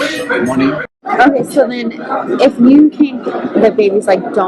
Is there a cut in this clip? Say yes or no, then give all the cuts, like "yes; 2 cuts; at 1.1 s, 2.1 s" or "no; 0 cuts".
yes; 1 cut; at 1.0 s